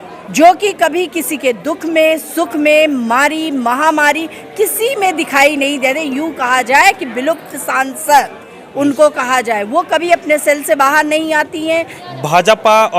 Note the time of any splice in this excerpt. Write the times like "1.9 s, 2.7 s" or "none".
12.0 s